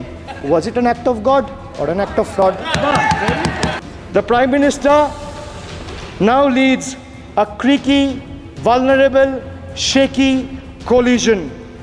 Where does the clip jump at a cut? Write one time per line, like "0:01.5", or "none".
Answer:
0:03.7